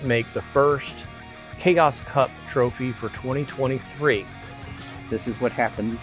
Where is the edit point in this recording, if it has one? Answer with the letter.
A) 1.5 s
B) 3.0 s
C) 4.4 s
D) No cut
C